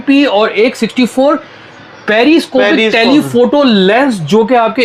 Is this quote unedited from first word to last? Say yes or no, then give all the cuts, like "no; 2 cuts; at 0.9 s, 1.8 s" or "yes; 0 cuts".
yes; 0 cuts